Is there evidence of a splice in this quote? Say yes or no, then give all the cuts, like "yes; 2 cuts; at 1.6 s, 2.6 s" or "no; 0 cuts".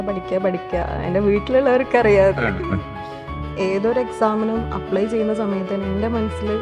yes; 1 cut; at 3.3 s